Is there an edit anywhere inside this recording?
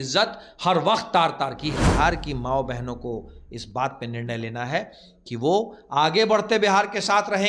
yes; 1 cut; at 1.8 s

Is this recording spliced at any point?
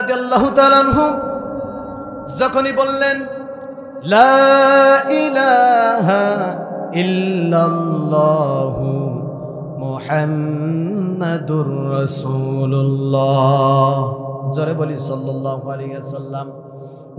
no; 0 cuts

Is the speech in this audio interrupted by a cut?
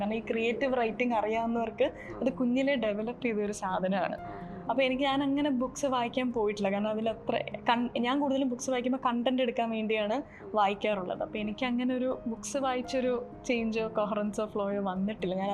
no; 0 cuts

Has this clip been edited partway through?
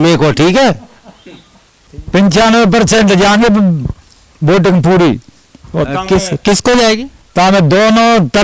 yes; 1 cut; at 1.8 s

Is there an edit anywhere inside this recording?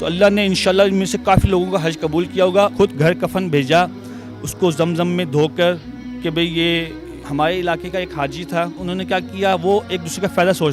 yes; 3 cuts; at 2.7 s, 7.2 s, 8.8 s

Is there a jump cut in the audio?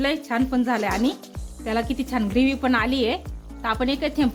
no; 0 cuts

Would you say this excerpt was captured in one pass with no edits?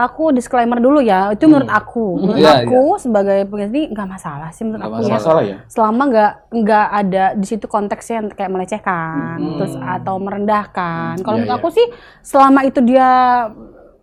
yes; 0 cuts

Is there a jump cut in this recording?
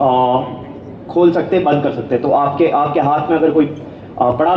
no; 0 cuts

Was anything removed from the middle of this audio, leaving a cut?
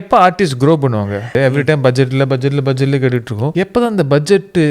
yes; 2 cuts; at 1.4 s, 3.5 s

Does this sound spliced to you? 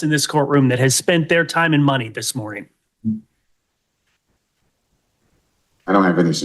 yes; 1 cut; at 4.8 s

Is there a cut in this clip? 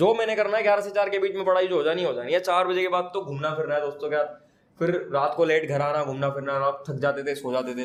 no; 0 cuts

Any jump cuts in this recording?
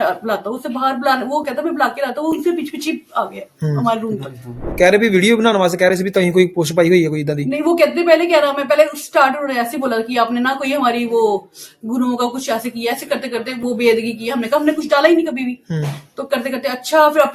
yes; 1 cut; at 4.6 s

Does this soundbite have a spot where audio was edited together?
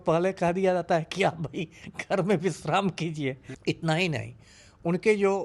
yes; 1 cut; at 3.5 s

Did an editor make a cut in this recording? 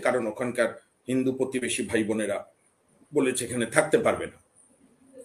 no; 0 cuts

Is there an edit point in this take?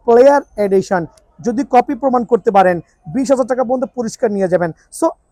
no; 0 cuts

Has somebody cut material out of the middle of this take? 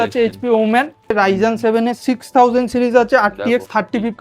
yes; 1 cut; at 1.1 s

